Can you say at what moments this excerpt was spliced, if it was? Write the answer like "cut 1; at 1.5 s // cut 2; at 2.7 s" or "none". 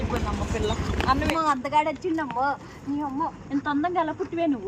cut 1; at 1.3 s